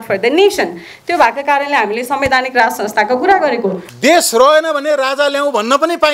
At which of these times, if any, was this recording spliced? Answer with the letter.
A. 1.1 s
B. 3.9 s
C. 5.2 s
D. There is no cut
B